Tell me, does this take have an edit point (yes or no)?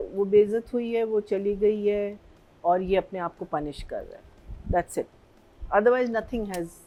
no